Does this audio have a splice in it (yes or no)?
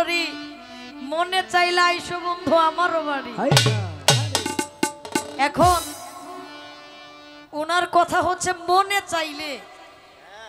no